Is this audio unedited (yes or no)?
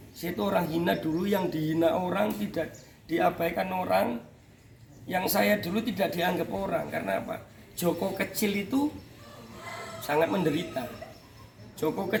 yes